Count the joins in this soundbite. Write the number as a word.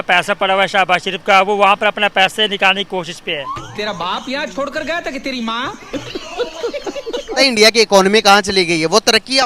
two